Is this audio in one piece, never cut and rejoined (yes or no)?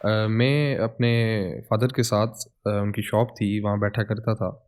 yes